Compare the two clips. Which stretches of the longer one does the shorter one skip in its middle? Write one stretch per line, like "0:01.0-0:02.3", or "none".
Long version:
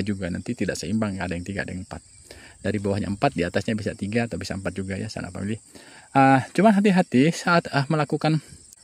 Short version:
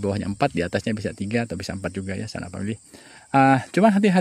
none